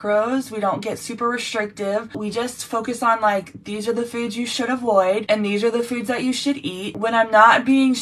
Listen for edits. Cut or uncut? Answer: cut